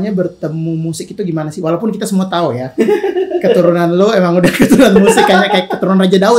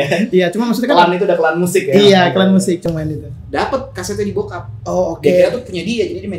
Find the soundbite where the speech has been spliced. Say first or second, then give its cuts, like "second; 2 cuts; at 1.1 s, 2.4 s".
second; 1 cut; at 2.8 s